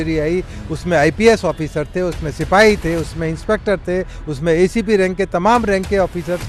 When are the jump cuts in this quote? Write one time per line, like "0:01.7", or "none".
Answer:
none